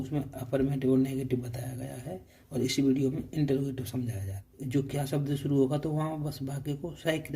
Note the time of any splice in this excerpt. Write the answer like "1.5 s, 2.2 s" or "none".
4.5 s